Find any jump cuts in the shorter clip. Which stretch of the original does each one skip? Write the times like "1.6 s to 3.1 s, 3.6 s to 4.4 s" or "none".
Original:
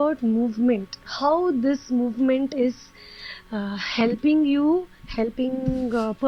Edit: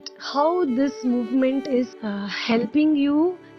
2.9 s to 3.5 s